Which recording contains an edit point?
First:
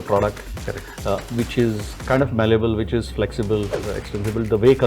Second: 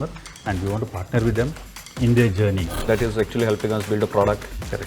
second; 1 cut; at 2.9 s

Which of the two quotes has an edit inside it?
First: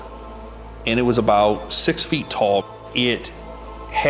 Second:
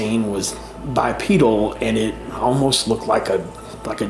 first; 1 cut; at 2.7 s

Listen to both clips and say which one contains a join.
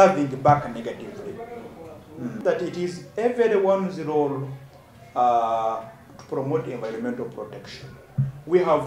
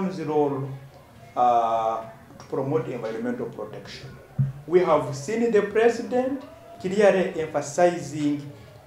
first; 1 cut; at 2.4 s

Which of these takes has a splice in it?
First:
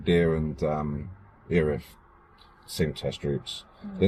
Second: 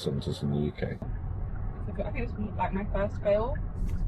second; 1 cut; at 1.0 s

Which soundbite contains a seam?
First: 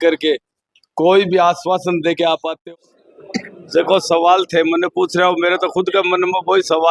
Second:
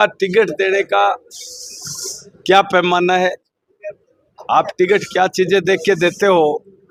first; 1 cut; at 2.5 s

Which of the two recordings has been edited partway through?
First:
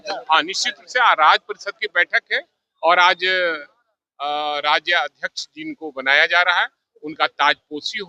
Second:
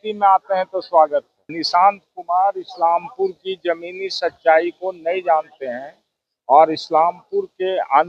second; 1 cut; at 1.4 s

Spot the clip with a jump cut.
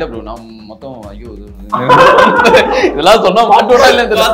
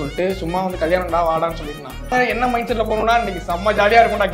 second; 1 cut; at 2.1 s

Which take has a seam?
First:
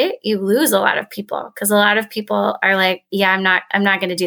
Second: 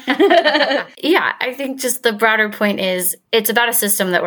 second; 2 cuts; at 0.9 s, 3.1 s

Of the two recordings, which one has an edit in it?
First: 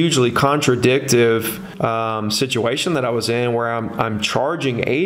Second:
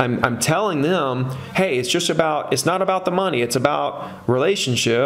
first; 1 cut; at 1.6 s

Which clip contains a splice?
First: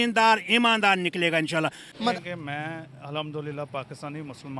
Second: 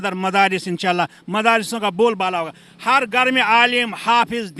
first; 1 cut; at 2.1 s

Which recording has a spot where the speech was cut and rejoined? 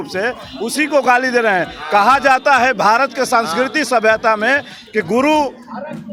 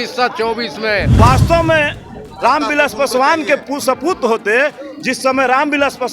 second; 1 cut; at 1.2 s

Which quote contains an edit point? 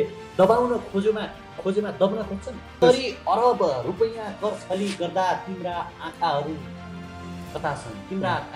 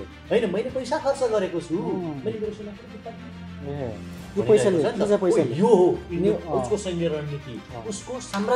first; 1 cut; at 2.8 s

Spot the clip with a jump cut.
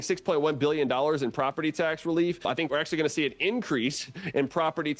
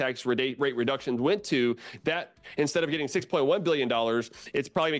first; 1 cut; at 2.7 s

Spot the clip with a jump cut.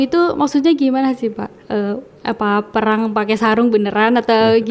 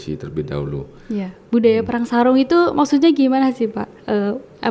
second; 1 cut; at 1.3 s

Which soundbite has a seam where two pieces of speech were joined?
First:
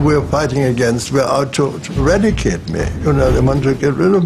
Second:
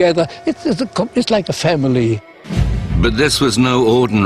first; 1 cut; at 2.6 s

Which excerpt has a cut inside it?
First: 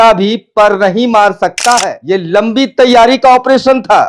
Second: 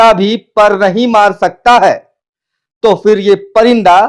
first; 1 cut; at 1.9 s

